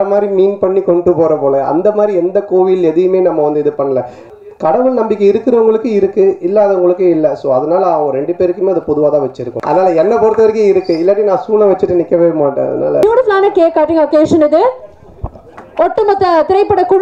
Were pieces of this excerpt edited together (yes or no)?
yes